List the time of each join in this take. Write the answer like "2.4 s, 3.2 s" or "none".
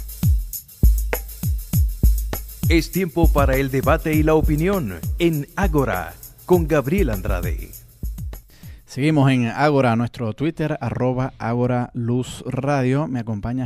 none